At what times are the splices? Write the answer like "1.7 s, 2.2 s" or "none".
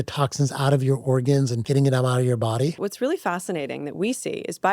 1.6 s, 2.8 s